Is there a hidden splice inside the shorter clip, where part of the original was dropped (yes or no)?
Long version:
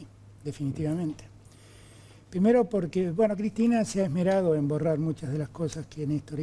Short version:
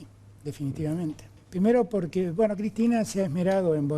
yes